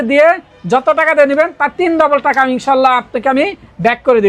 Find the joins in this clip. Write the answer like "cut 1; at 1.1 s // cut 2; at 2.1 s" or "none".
none